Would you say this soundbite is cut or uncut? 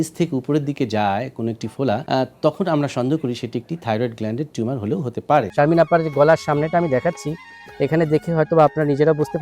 cut